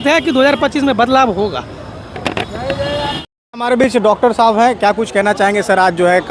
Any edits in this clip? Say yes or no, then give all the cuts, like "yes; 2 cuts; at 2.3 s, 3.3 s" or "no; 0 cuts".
no; 0 cuts